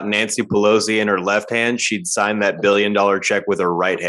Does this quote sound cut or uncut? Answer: uncut